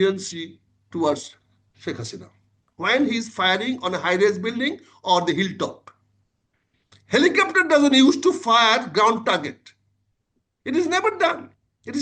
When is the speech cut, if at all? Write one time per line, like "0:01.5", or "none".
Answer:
0:02.7